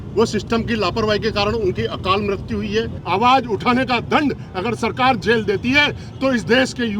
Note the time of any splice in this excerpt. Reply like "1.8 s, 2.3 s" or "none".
3.0 s